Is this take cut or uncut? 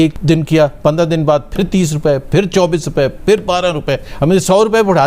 uncut